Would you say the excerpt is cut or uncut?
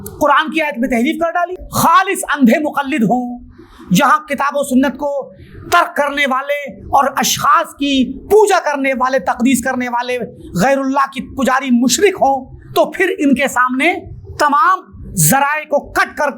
cut